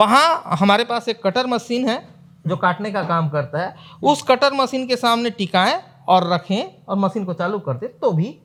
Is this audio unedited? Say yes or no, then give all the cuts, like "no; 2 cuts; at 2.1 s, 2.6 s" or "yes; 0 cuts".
yes; 0 cuts